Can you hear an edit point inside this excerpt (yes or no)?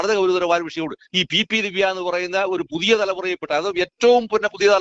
yes